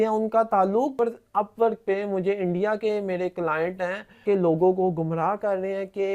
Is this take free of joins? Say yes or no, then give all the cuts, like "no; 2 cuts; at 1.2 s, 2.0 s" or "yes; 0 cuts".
no; 2 cuts; at 1.0 s, 4.2 s